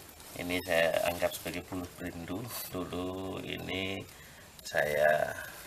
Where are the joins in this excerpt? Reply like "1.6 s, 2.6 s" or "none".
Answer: 2.6 s